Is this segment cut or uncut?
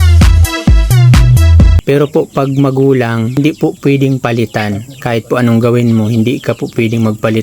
cut